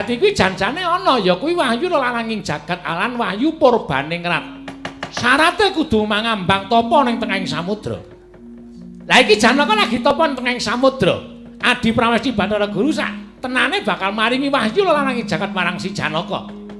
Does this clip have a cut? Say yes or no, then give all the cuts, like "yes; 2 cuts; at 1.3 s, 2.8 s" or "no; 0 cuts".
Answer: no; 0 cuts